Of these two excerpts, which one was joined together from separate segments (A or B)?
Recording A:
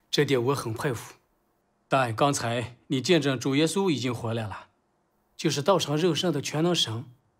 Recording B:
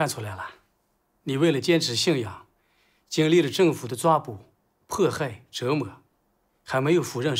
B